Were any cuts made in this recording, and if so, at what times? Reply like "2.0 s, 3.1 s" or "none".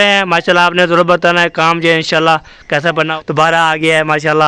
3.1 s